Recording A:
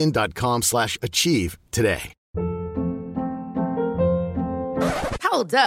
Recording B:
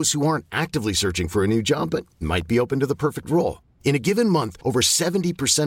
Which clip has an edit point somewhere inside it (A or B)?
A